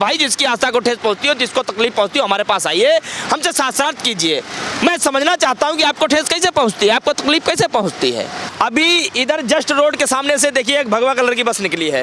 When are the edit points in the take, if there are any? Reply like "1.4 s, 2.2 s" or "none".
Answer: 8.5 s